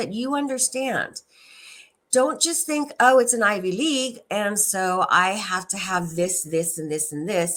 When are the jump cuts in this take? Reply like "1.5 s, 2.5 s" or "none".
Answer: none